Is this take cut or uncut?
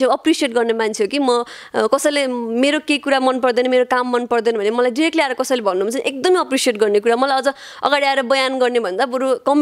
uncut